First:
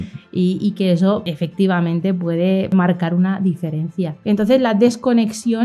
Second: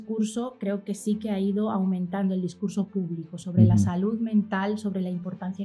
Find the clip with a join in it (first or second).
first